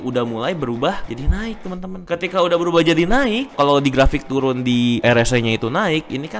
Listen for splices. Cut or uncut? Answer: cut